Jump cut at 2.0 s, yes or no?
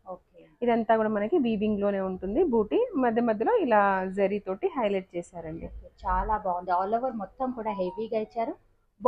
no